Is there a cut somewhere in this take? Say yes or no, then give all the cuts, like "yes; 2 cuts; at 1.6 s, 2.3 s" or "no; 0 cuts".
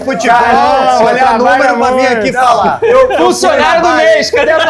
no; 0 cuts